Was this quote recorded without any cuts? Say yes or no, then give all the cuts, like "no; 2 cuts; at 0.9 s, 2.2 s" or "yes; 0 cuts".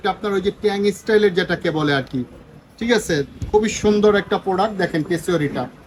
yes; 0 cuts